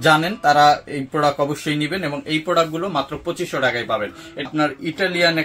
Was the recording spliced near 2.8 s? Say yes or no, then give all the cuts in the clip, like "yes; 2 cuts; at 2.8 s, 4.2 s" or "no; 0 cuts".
no; 1 cut; at 4.5 s